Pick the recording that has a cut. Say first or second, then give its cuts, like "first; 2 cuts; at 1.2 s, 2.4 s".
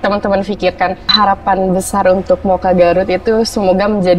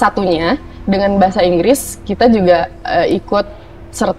first; 1 cut; at 1.1 s